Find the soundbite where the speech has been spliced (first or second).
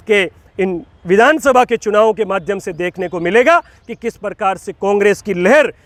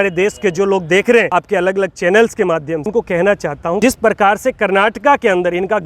second